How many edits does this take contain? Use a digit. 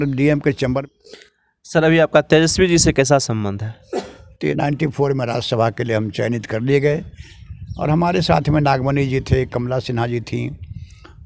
2